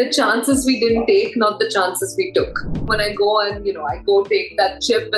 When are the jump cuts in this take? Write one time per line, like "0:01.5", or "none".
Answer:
0:02.9